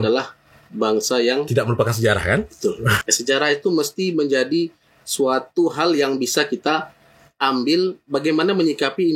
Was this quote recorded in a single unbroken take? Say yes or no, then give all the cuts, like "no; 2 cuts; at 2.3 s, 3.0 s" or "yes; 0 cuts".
no; 1 cut; at 3.1 s